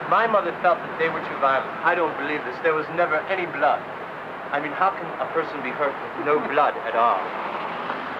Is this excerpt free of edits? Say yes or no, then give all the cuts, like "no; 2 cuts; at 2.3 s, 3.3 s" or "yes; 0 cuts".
no; 1 cut; at 3.3 s